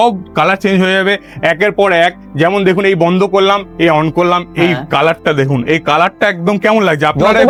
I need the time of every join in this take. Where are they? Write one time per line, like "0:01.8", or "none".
none

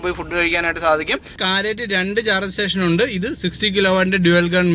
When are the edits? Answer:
0:01.4

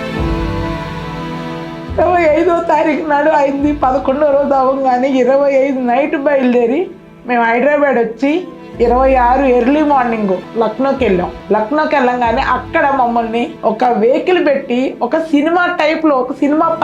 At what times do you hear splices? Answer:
0:10.5
0:11.4
0:13.5

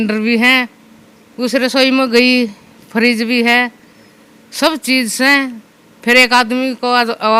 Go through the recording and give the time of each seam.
none

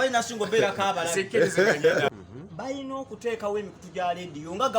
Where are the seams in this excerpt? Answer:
0:02.1

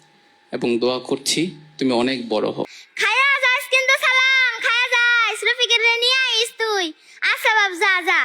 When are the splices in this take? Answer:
0:02.8

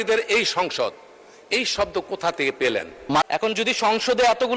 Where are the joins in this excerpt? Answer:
0:03.2

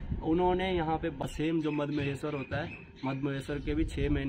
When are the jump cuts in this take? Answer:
0:01.2

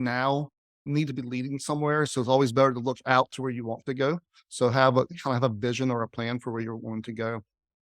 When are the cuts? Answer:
0:05.1

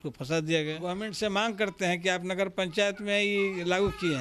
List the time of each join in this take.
0:01.0

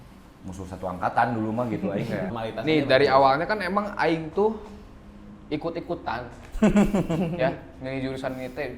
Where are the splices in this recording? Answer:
0:02.3

